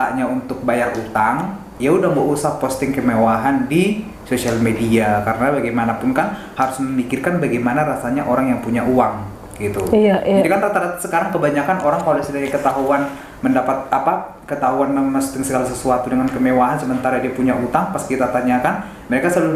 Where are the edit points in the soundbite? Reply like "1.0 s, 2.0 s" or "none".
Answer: none